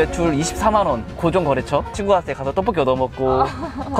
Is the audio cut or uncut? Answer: cut